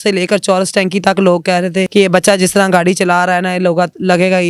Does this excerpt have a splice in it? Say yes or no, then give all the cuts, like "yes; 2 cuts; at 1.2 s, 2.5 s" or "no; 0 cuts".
yes; 1 cut; at 1.9 s